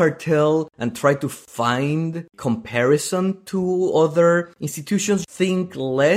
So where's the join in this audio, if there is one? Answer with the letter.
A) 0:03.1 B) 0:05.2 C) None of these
B